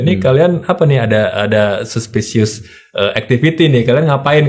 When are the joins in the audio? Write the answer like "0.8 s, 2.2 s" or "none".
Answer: none